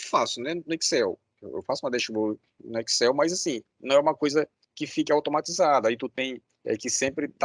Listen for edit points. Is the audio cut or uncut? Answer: uncut